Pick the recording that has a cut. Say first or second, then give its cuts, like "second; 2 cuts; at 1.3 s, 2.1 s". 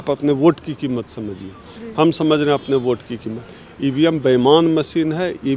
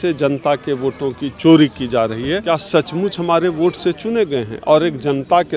second; 1 cut; at 2.4 s